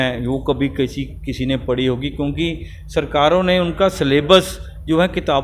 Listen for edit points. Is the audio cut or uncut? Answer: uncut